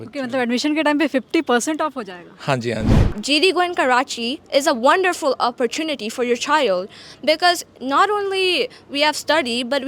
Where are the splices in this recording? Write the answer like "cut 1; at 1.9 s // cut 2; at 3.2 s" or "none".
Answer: cut 1; at 3.1 s